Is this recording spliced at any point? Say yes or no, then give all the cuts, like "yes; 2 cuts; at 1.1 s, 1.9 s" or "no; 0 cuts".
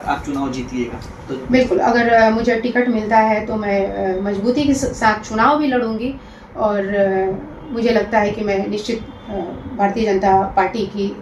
no; 0 cuts